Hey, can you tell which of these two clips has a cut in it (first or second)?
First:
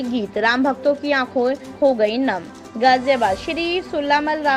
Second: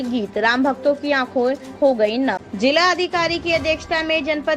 second